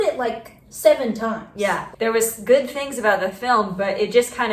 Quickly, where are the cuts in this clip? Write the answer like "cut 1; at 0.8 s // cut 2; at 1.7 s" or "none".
cut 1; at 1.8 s